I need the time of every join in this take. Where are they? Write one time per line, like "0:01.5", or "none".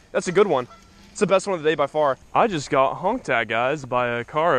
0:02.2

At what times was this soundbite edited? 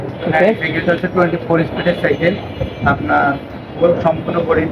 none

